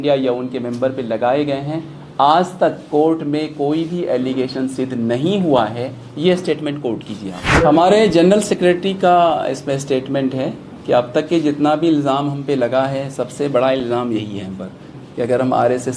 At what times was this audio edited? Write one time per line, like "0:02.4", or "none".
0:07.4